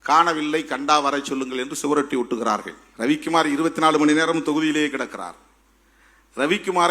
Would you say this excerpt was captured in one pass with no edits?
no; 1 cut; at 2.8 s

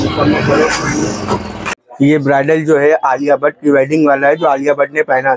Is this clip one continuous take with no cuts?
no; 1 cut; at 1.8 s

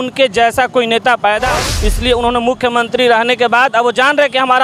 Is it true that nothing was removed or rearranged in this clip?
no; 1 cut; at 1.6 s

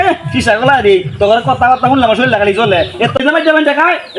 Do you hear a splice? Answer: yes; 1 cut; at 3.2 s

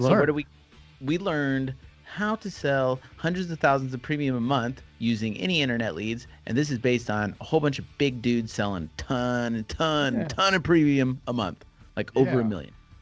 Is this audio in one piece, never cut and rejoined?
yes; 0 cuts

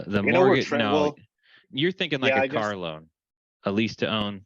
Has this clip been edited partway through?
yes; 1 cut; at 1.7 s

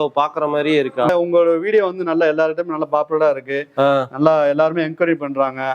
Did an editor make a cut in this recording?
yes; 1 cut; at 1.1 s

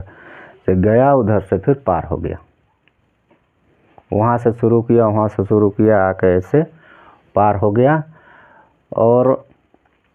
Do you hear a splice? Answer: no; 0 cuts

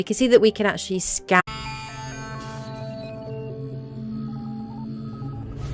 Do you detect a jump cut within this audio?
no; 0 cuts

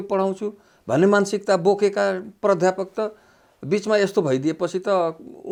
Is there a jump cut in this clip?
no; 0 cuts

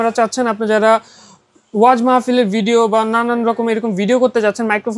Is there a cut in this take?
no; 0 cuts

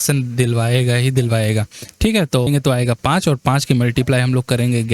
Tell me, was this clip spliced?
yes; 1 cut; at 2.5 s

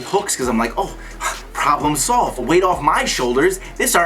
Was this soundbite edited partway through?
yes; 1 cut; at 2.4 s

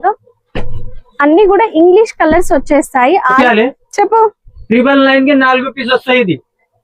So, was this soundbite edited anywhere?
yes; 1 cut; at 3.4 s

